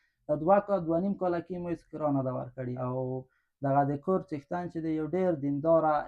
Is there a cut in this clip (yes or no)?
yes